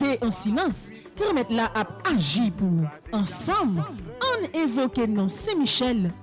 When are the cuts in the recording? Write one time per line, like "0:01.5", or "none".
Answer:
none